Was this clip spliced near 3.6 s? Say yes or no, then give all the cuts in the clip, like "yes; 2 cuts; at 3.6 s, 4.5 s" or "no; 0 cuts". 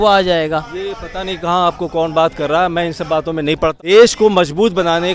yes; 1 cut; at 3.6 s